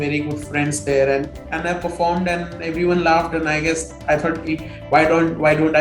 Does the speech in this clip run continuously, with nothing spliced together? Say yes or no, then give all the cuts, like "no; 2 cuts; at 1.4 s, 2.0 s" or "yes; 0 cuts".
no; 1 cut; at 1.3 s